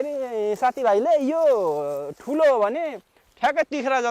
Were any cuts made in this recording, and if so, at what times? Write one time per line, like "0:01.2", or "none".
none